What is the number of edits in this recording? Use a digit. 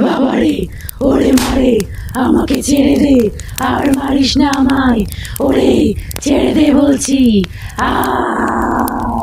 0